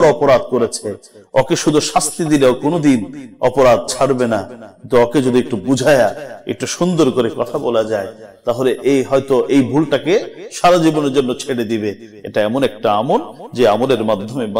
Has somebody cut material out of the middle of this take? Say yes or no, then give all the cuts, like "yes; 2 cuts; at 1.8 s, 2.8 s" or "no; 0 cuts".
no; 0 cuts